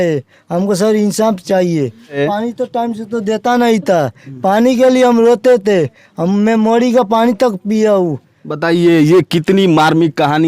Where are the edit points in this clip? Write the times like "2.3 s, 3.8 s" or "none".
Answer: 2.2 s